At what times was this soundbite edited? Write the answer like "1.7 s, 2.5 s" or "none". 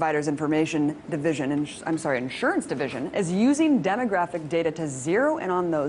none